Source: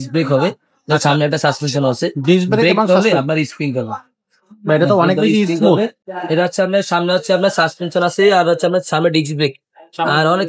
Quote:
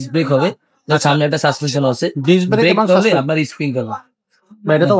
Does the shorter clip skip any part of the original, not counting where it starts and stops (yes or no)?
no